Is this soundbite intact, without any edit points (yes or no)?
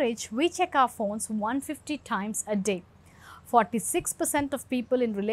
yes